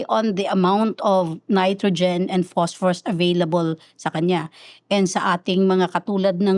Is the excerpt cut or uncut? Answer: uncut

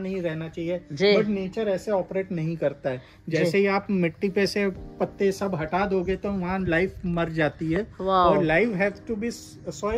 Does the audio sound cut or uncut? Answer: uncut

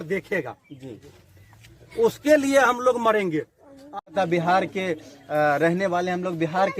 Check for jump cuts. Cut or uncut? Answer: cut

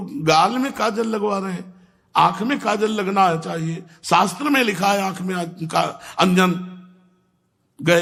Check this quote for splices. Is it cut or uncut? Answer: uncut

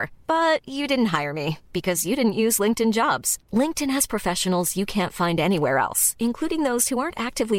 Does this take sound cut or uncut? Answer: uncut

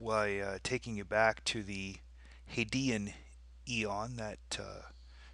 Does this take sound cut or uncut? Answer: uncut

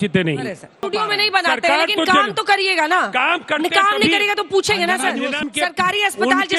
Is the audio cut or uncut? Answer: cut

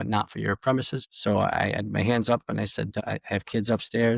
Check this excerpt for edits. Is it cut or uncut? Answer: cut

